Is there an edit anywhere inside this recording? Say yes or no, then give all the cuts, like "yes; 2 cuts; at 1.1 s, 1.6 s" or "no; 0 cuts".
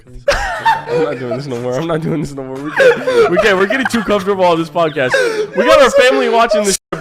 no; 0 cuts